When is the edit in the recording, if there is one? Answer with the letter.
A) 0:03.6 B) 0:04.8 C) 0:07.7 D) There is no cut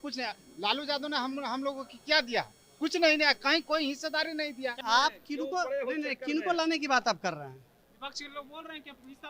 B